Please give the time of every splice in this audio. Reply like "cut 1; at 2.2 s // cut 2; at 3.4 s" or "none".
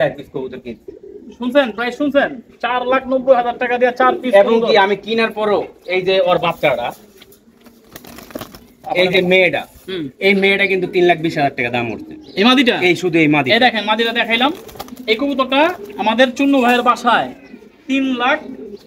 none